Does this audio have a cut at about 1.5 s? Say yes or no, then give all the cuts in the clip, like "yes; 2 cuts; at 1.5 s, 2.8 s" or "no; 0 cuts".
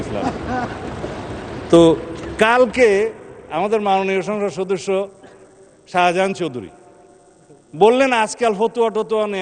no; 0 cuts